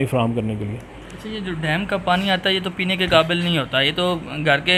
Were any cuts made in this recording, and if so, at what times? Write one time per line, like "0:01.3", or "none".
none